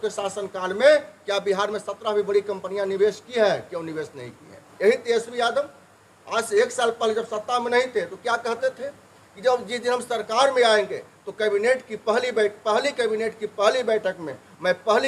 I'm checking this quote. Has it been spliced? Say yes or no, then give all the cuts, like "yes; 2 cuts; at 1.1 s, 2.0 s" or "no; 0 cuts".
yes; 1 cut; at 4.7 s